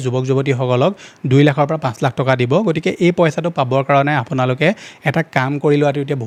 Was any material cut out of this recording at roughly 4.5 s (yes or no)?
no